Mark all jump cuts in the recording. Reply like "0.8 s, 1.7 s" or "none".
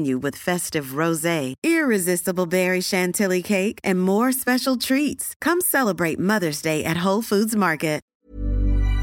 8.1 s